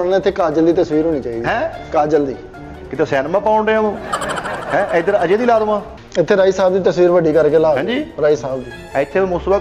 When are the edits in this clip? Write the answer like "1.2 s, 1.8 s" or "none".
6.0 s